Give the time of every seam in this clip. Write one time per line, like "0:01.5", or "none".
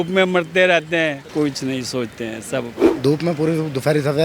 0:01.2
0:02.8

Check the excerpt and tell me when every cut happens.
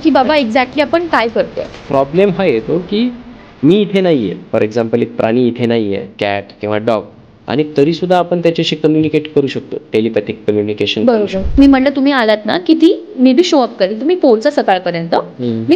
0:01.8
0:11.4

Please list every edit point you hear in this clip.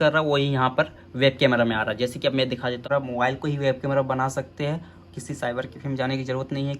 0:02.8

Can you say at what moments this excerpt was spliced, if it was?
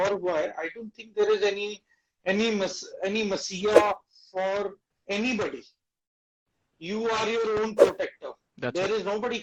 none

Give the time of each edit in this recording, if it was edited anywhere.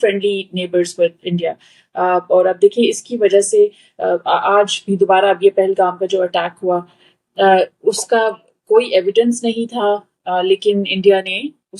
none

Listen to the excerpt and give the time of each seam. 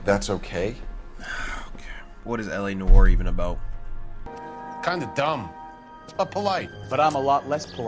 0:04.3

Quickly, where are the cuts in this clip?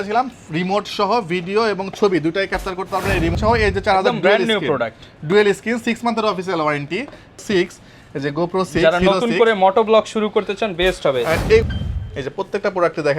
0:03.3
0:07.4
0:11.7

